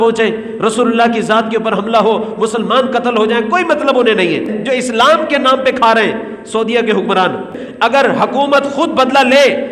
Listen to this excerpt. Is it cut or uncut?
cut